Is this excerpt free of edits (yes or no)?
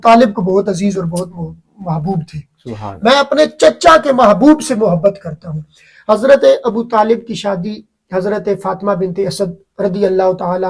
yes